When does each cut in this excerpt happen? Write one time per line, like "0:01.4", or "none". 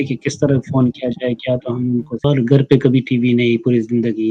0:02.2